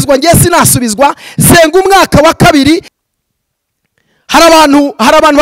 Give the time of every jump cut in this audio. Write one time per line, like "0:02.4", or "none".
0:02.9